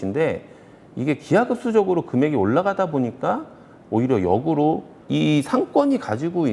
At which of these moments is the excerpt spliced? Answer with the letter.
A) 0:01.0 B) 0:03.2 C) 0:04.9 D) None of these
C